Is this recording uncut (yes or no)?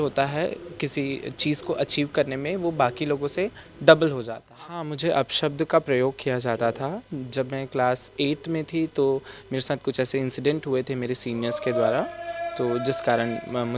no